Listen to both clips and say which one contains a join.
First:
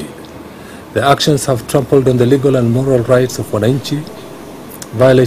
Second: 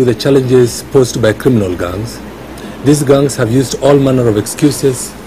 first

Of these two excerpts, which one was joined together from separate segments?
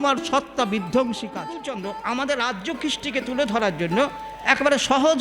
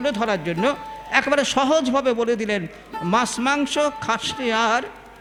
first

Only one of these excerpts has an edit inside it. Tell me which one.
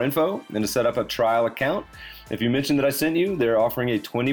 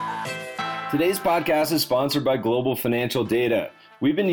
second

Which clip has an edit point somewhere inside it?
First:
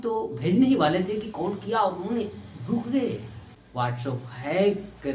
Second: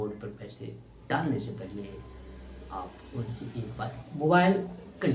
first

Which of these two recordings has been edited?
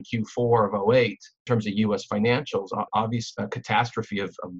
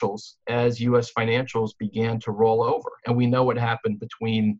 first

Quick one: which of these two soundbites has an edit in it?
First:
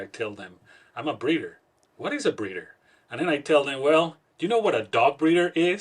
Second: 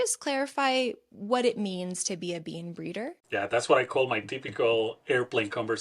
second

